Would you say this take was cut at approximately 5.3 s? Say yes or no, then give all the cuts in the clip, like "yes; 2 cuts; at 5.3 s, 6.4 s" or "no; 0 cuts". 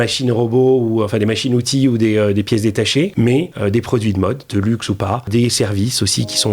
yes; 2 cuts; at 3.3 s, 5.3 s